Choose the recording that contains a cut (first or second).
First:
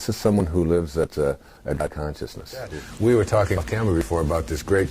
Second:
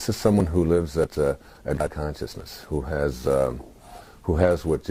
first